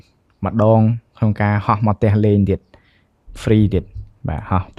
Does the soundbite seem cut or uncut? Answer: uncut